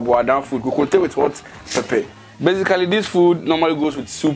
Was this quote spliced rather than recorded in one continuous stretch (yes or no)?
yes